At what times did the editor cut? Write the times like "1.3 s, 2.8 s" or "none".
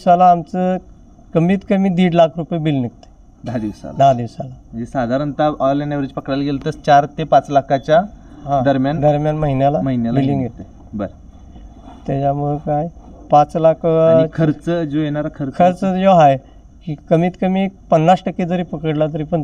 none